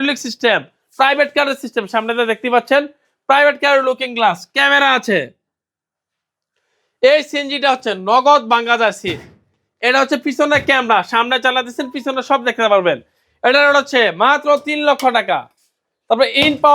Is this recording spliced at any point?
no; 0 cuts

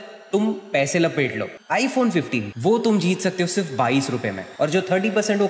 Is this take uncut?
no; 3 cuts; at 1.6 s, 2.5 s, 4.4 s

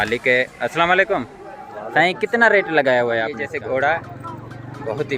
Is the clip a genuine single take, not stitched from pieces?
no; 1 cut; at 3.4 s

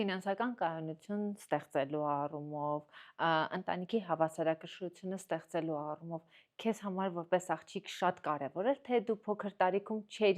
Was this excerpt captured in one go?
yes; 0 cuts

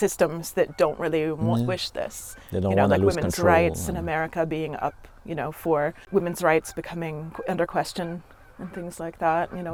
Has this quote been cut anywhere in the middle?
no; 0 cuts

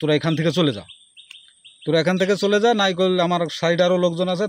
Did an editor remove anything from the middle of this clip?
no; 0 cuts

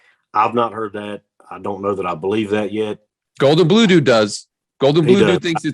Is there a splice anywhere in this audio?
yes; 1 cut; at 3.1 s

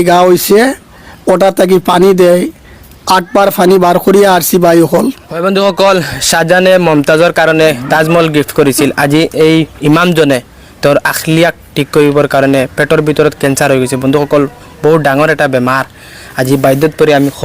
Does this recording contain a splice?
yes; 1 cut; at 5.3 s

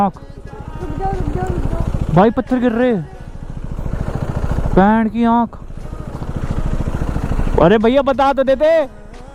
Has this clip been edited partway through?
no; 0 cuts

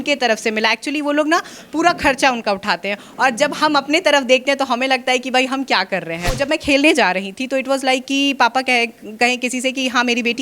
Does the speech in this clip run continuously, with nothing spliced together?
no; 1 cut; at 6.4 s

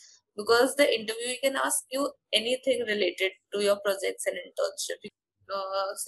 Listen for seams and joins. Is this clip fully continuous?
no; 1 cut; at 5.1 s

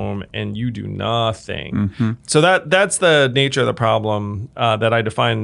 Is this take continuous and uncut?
no; 1 cut; at 2.2 s

